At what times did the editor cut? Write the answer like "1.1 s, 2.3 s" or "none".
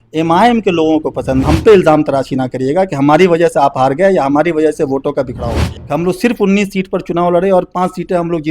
1.4 s, 5.7 s